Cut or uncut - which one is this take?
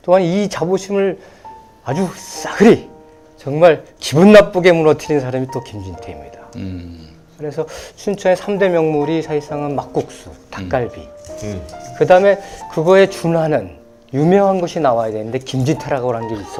uncut